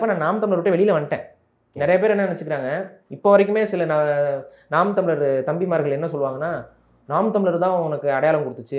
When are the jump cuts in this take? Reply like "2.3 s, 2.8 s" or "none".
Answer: none